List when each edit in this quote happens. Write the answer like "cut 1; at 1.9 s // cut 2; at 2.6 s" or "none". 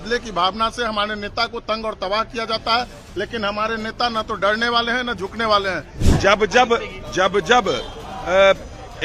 cut 1; at 6.0 s